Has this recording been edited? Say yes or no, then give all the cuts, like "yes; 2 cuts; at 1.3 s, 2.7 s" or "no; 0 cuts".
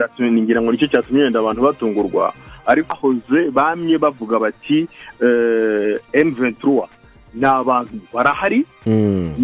yes; 1 cut; at 2.9 s